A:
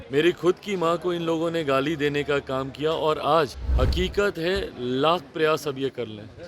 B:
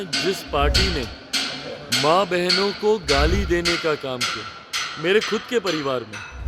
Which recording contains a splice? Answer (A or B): A